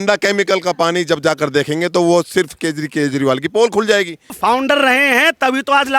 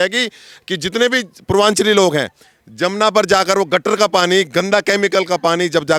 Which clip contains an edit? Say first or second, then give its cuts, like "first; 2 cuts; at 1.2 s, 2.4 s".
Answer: first; 1 cut; at 4.3 s